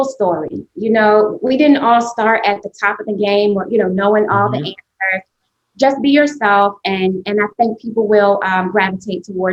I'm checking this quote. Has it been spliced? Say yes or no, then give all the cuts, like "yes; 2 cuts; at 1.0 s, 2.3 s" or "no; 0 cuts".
no; 0 cuts